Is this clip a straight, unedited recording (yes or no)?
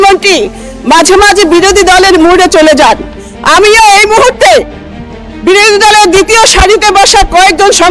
yes